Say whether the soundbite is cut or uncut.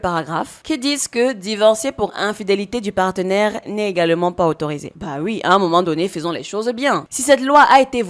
cut